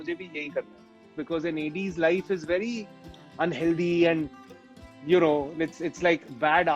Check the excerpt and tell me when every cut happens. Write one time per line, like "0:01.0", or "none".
0:01.2